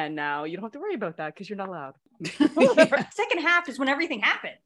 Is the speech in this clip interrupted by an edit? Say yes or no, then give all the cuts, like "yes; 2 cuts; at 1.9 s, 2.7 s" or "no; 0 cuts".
yes; 2 cuts; at 2.1 s, 3.1 s